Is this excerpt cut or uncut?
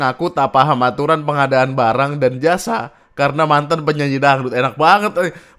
uncut